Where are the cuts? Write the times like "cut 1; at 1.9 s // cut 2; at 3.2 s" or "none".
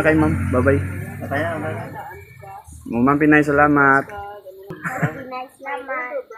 cut 1; at 4.8 s

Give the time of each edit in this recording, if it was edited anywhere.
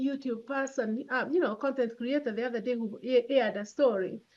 none

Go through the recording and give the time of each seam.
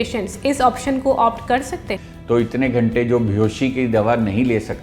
cut 1; at 1.9 s

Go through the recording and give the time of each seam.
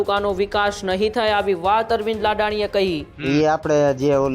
cut 1; at 3.1 s

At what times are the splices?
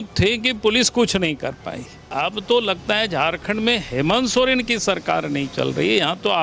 cut 1; at 2.1 s

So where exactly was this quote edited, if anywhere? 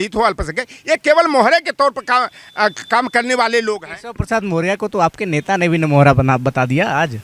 none

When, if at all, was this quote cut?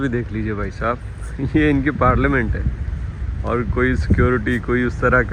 none

